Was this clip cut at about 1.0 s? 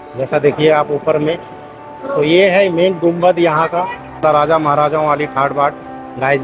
no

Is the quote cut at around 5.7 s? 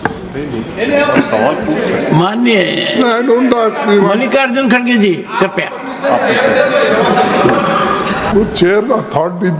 no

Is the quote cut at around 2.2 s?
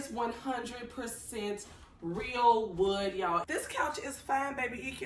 no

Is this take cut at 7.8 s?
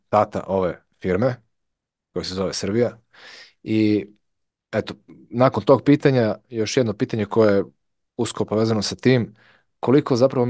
no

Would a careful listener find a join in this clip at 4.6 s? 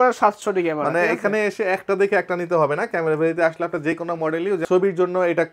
yes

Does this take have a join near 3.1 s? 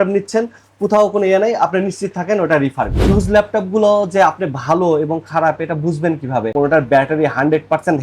yes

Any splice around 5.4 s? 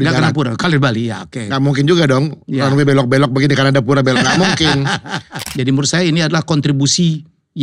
yes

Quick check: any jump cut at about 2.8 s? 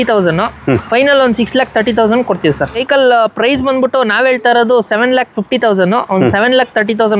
yes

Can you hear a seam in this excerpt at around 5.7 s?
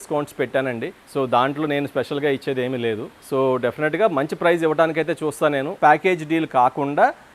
yes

